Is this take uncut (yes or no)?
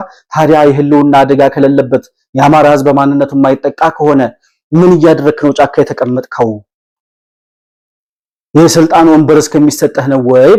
yes